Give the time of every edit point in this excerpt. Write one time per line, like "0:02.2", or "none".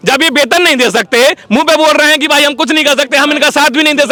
none